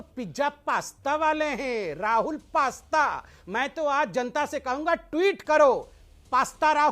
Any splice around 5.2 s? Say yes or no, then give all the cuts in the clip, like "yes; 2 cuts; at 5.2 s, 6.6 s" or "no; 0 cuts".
no; 2 cuts; at 1.8 s, 3.2 s